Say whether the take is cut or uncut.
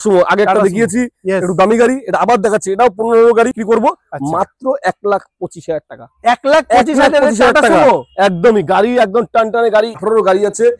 cut